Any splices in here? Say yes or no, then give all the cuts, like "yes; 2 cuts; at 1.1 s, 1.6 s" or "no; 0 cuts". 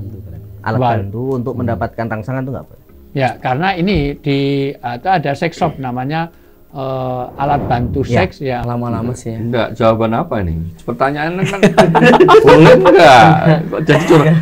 yes; 1 cut; at 8.6 s